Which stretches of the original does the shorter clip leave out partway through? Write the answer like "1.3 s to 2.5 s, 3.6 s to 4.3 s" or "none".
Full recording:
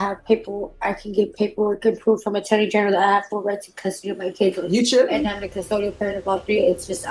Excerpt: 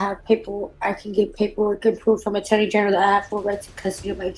none